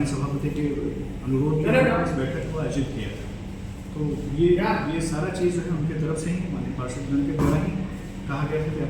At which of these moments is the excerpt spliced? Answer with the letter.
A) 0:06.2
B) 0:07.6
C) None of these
C